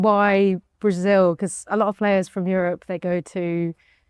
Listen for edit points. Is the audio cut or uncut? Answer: uncut